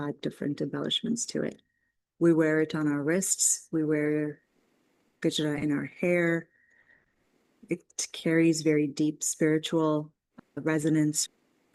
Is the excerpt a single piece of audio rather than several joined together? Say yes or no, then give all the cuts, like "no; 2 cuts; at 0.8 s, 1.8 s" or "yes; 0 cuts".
yes; 0 cuts